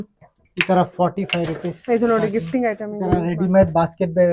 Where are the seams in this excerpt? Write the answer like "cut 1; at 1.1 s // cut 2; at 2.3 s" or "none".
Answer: cut 1; at 2.9 s